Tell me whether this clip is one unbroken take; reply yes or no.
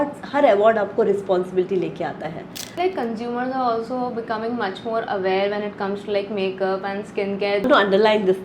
no